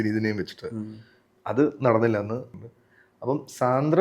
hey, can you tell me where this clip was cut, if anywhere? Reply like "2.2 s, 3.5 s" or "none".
2.5 s

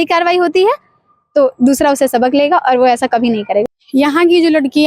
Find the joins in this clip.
none

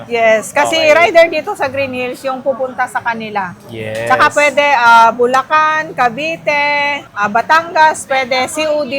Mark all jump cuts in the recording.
none

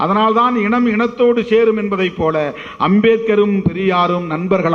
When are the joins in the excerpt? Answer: none

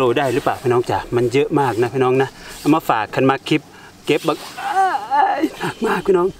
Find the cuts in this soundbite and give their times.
none

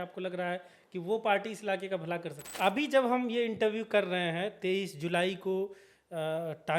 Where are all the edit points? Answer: 2.4 s

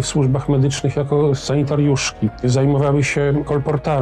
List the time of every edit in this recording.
1.4 s, 2.4 s

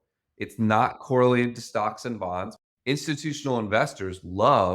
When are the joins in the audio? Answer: 2.6 s

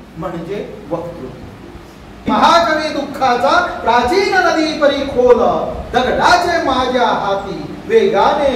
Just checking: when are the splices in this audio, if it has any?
2.3 s

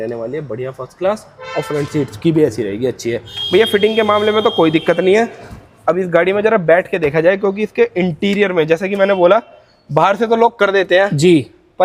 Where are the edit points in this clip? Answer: none

